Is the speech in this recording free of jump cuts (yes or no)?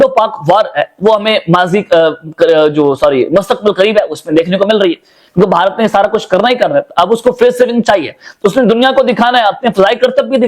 yes